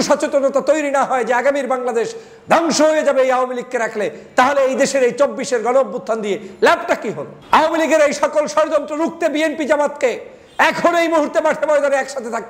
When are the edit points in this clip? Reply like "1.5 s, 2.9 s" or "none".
7.3 s